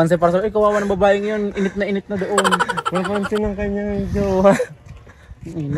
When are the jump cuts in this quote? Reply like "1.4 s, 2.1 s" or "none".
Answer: none